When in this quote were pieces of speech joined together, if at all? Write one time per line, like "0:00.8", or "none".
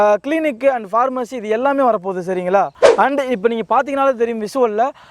0:02.7